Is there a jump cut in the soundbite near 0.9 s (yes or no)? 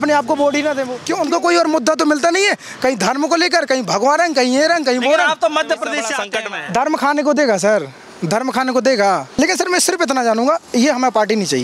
yes